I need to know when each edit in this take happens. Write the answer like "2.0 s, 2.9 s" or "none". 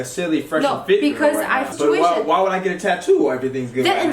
1.7 s